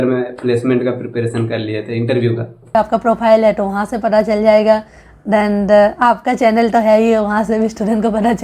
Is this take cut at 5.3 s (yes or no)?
no